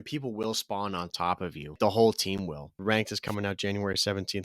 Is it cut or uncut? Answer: cut